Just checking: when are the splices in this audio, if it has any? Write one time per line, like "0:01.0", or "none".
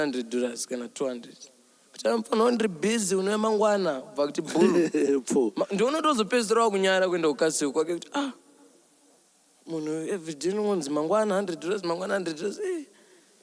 none